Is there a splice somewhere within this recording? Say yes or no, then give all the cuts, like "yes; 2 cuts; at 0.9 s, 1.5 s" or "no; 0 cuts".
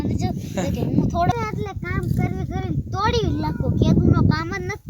yes; 1 cut; at 1.3 s